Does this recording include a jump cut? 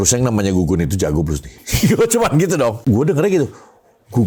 yes; 1 cut; at 2.8 s

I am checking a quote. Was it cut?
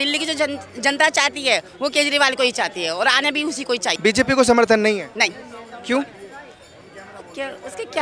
yes; 1 cut; at 3.9 s

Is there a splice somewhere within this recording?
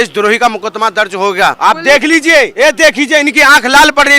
yes; 2 cuts; at 1.6 s, 2.5 s

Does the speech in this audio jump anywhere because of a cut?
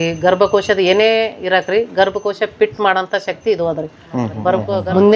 yes; 1 cut; at 4.3 s

